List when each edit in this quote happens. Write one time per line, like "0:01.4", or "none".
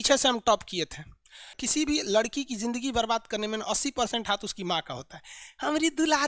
0:01.6